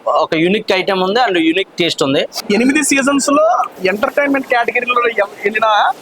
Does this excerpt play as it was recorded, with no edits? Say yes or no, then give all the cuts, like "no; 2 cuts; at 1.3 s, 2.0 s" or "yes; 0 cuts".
no; 2 cuts; at 2.4 s, 3.7 s